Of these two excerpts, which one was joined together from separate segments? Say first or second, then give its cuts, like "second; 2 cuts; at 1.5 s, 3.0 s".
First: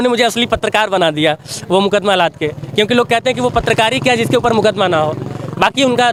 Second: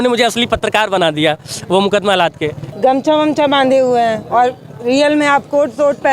second; 1 cut; at 2.6 s